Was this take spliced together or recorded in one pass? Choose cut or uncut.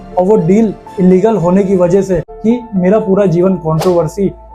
cut